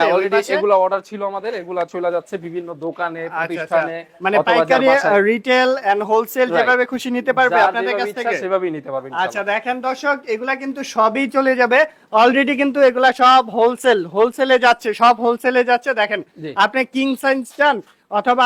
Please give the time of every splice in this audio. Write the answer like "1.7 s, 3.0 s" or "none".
none